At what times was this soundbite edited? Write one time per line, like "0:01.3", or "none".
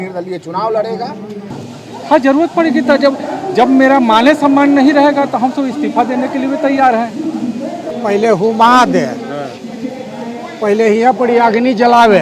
0:01.6
0:07.8